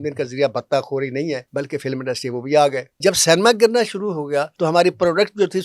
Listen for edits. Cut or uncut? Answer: cut